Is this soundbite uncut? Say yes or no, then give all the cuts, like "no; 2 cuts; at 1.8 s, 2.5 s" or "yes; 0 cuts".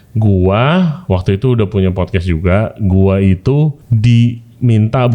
no; 1 cut; at 3.9 s